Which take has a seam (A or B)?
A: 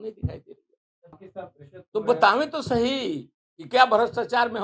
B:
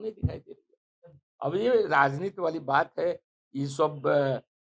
A